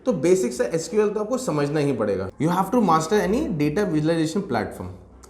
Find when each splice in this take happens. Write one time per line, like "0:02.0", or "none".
0:02.3